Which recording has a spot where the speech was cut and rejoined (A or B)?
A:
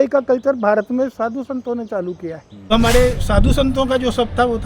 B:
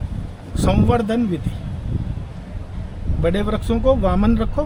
A